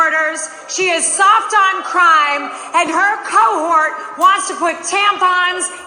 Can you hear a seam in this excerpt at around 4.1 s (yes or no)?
no